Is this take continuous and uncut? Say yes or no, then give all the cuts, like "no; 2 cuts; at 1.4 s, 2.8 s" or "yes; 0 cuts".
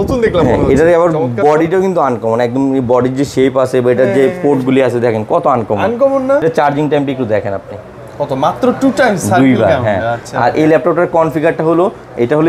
no; 1 cut; at 6.4 s